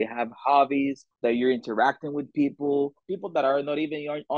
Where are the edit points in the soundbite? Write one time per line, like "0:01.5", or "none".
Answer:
0:01.1
0:03.1